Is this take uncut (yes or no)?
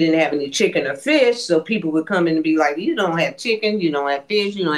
yes